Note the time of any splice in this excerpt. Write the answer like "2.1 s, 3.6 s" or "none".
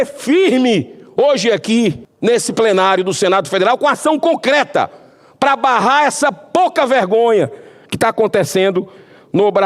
2.1 s

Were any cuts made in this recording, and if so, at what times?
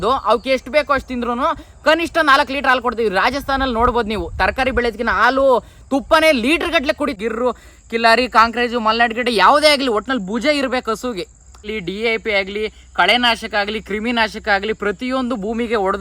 7.2 s, 11.6 s

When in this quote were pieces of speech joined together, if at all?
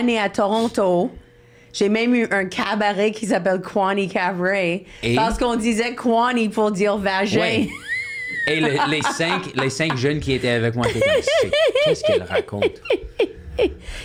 none

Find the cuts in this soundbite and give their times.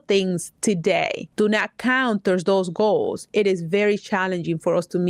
1.2 s

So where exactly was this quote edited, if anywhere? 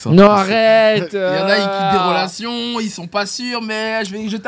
none

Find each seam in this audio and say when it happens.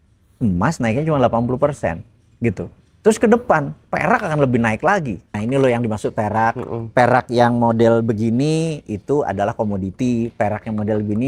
5.4 s

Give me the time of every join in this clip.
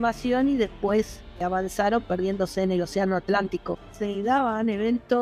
1.4 s, 3.9 s

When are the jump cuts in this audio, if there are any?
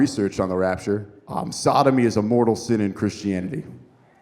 1.2 s

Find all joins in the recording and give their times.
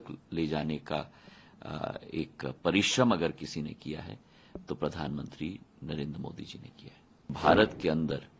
7.3 s

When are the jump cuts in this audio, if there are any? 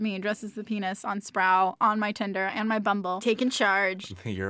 3.2 s

